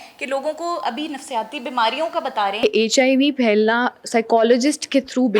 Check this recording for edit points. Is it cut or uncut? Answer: cut